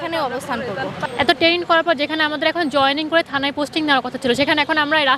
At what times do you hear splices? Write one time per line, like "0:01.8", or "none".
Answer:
0:01.0